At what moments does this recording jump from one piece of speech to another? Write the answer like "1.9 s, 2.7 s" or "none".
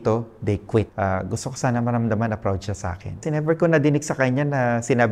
0.9 s, 3.2 s